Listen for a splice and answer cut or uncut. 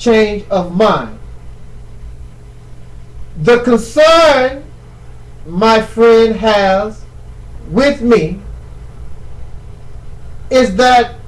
uncut